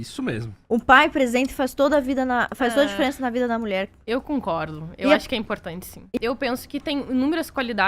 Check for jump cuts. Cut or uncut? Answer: cut